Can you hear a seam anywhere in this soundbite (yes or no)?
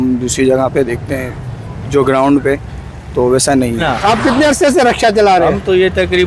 yes